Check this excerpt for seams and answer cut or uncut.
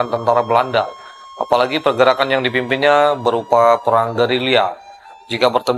uncut